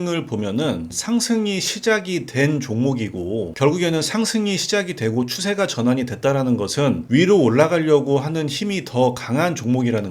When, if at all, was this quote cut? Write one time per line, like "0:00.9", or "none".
0:00.9